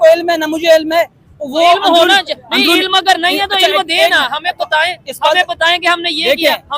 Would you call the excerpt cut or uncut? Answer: uncut